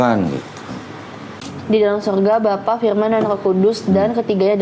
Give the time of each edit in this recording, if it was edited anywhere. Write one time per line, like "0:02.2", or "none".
0:01.0